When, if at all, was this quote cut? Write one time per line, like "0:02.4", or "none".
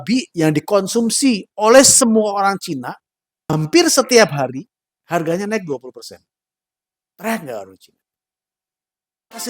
0:03.5